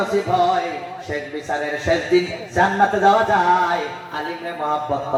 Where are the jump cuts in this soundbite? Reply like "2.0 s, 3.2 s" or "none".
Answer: none